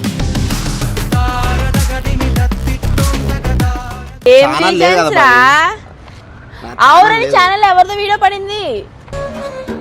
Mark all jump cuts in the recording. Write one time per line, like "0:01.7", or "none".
0:04.3